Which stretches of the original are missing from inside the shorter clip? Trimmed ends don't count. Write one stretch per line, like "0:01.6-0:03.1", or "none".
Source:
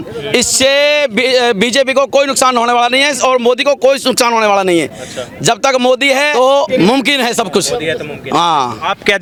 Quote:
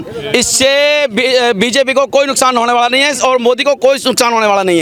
none